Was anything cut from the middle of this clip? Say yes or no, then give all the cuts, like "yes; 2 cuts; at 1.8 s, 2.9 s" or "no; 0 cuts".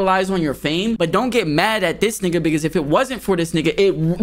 yes; 1 cut; at 1.0 s